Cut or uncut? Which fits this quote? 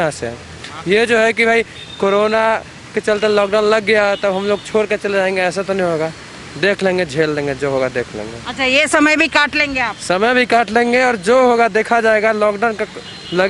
uncut